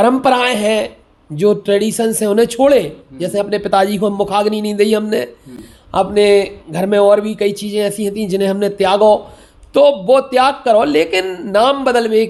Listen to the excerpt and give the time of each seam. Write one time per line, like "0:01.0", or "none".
none

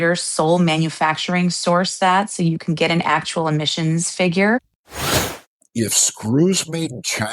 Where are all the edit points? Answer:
0:05.1

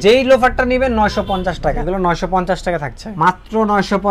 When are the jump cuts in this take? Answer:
0:01.8
0:03.0

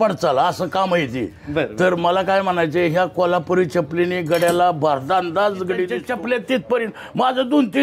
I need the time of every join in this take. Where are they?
0:06.0

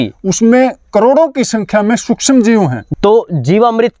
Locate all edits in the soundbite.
0:02.8

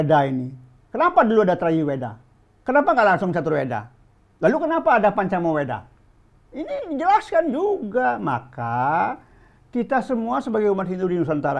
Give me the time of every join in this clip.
none

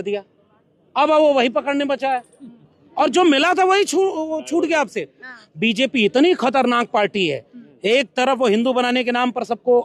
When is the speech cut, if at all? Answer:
none

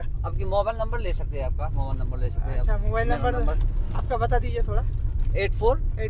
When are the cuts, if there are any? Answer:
none

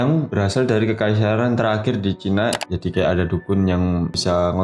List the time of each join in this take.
0:02.6

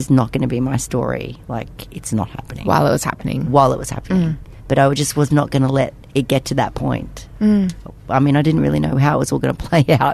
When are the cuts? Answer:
none

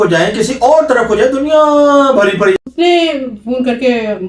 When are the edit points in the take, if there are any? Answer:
0:02.6

